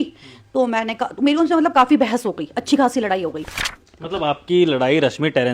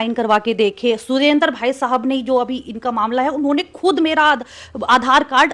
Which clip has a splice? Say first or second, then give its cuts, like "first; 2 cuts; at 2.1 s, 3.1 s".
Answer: first; 1 cut; at 3.7 s